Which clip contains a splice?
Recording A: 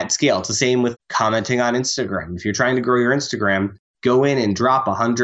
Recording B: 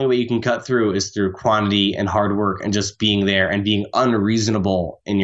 A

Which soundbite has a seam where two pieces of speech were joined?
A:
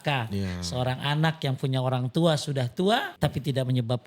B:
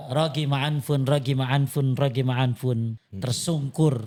A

